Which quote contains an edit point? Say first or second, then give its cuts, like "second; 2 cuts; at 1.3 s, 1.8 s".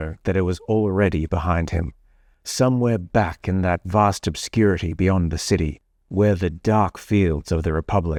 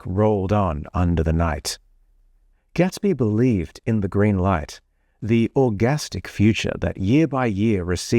second; 2 cuts; at 2.2 s, 6.9 s